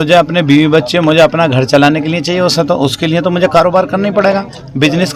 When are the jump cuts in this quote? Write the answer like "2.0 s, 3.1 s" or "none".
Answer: none

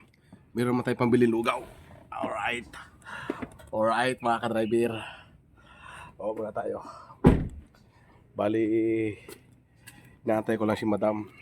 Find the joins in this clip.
none

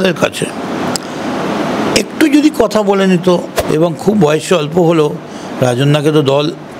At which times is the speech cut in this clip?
3.6 s

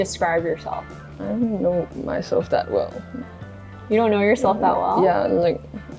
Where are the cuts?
none

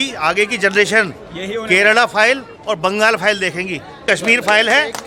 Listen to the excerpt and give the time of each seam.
4.0 s

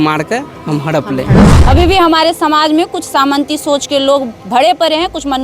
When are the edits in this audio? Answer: 1.5 s

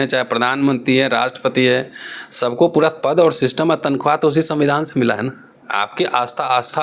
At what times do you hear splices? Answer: 5.6 s

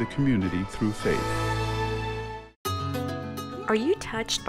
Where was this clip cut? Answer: 1.2 s, 2.5 s

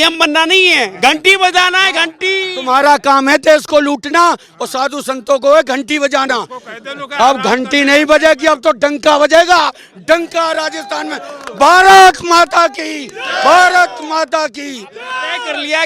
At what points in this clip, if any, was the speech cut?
none

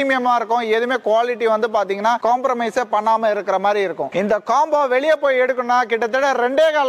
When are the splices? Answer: 4.1 s

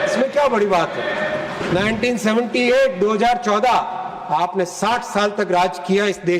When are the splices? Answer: 1.6 s

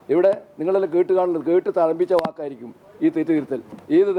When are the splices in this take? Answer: none

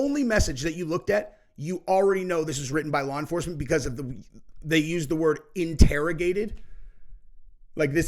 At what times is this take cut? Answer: none

